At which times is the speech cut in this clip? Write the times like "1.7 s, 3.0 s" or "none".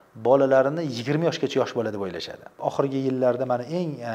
2.5 s